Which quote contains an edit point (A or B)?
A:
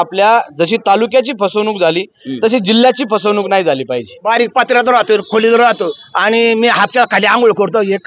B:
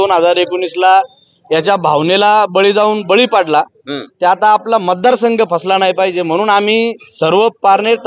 A